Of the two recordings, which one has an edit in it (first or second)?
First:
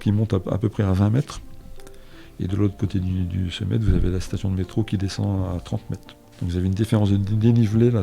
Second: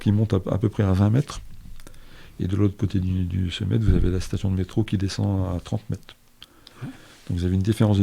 first